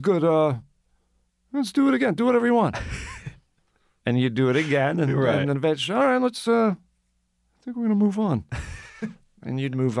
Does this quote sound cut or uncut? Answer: uncut